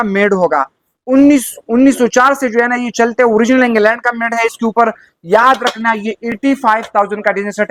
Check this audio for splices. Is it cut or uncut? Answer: uncut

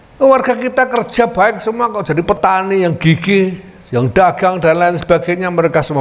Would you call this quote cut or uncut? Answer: cut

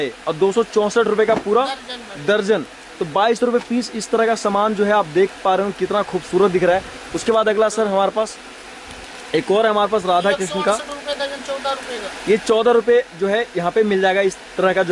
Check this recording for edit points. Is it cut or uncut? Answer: uncut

